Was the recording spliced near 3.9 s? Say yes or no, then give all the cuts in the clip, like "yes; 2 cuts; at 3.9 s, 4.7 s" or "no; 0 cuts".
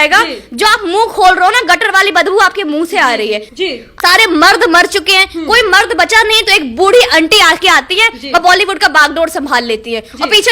yes; 1 cut; at 3.9 s